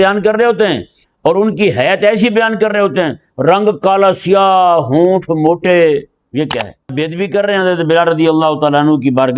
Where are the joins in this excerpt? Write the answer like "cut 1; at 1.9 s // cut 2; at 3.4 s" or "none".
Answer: cut 1; at 6.9 s